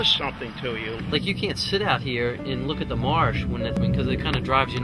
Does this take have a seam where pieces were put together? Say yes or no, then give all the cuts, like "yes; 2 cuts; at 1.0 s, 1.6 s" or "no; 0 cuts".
yes; 2 cuts; at 1.0 s, 3.8 s